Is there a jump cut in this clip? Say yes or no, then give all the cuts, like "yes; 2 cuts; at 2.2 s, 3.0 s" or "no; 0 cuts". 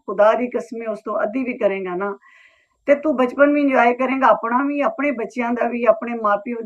no; 0 cuts